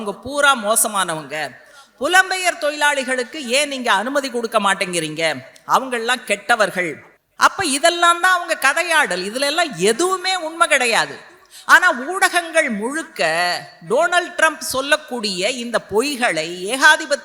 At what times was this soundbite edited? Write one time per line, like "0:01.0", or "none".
none